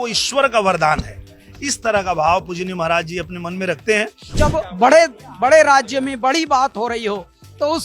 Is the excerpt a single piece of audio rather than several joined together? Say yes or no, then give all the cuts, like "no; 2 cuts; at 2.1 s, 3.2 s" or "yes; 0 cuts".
no; 1 cut; at 4.4 s